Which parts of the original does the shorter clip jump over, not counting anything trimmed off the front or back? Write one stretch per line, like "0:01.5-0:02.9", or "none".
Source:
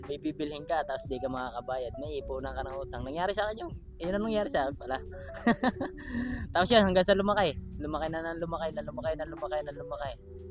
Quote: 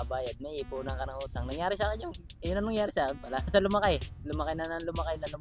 0:05.1-0:07.1